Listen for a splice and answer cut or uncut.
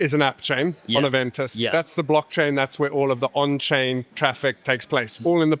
uncut